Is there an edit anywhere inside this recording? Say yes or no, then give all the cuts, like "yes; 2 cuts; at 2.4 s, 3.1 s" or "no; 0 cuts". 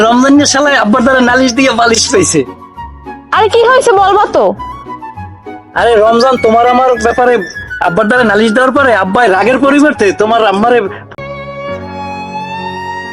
yes; 1 cut; at 11.2 s